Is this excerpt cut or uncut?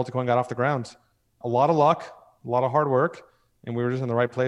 uncut